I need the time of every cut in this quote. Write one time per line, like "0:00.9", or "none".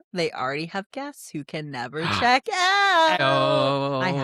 0:03.2

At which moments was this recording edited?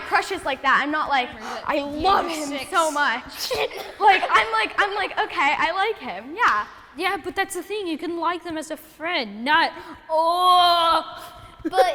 none

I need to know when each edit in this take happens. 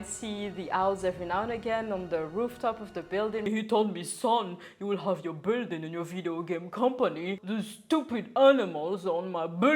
0:03.4
0:07.4

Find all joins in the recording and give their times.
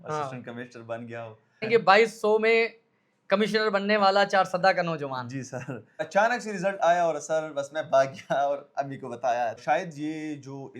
0:01.6
0:06.1
0:09.6

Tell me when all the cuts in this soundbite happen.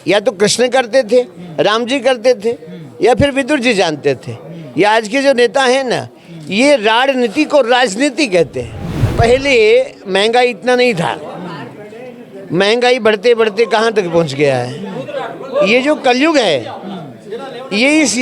0:09.1

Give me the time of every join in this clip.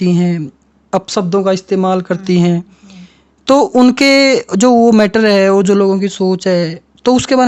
none

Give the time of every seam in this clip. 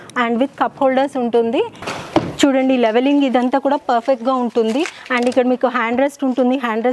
0:01.8

